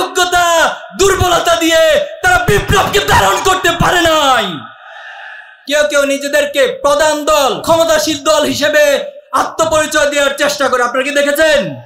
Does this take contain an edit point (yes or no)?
yes